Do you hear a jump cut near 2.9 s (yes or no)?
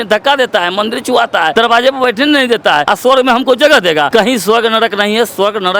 yes